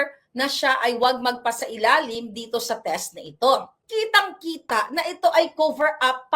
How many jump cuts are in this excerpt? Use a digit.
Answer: 1